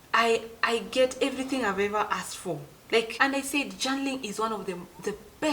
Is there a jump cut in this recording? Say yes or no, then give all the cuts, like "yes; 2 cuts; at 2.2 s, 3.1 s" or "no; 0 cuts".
yes; 1 cut; at 3.1 s